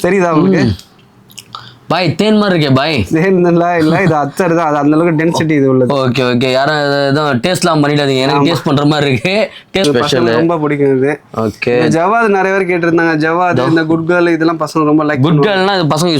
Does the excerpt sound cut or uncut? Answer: cut